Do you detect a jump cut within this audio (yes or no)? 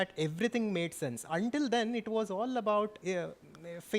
no